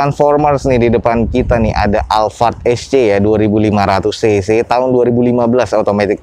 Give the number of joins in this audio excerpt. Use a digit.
0